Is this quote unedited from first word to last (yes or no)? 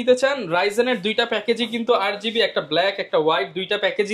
yes